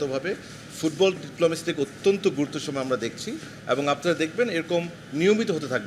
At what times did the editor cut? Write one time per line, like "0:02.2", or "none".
none